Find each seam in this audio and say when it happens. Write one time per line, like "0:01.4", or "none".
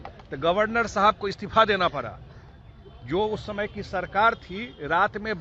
none